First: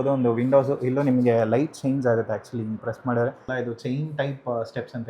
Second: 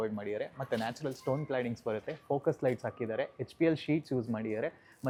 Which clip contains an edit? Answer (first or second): first